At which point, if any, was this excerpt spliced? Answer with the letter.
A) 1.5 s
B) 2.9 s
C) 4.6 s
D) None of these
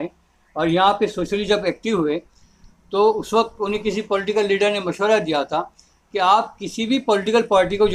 D